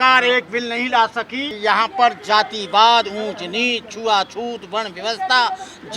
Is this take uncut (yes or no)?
no